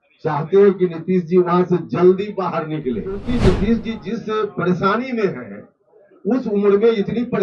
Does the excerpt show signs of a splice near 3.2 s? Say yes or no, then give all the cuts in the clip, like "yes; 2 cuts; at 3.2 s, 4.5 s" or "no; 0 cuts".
yes; 1 cut; at 3.2 s